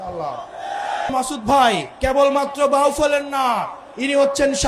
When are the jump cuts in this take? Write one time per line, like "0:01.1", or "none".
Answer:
0:01.1
0:01.9